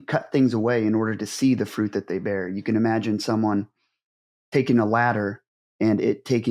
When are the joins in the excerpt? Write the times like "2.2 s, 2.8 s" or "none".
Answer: none